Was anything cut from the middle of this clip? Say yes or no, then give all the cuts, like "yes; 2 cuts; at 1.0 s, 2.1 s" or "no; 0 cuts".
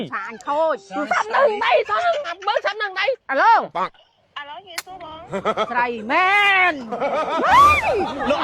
yes; 1 cut; at 3.2 s